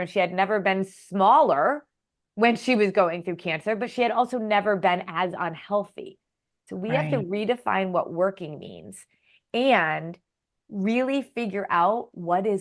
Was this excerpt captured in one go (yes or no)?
yes